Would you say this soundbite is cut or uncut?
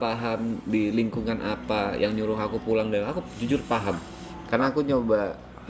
uncut